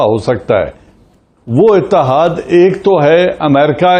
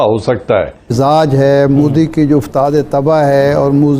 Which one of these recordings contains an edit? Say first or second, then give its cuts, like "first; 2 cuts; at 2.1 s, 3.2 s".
second; 1 cut; at 0.9 s